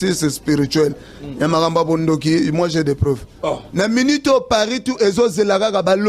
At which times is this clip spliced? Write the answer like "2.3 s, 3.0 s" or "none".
3.6 s